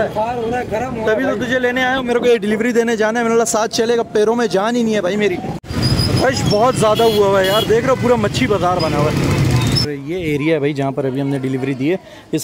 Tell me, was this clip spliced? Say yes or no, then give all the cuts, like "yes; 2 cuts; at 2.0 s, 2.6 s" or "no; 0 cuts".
yes; 2 cuts; at 5.6 s, 9.8 s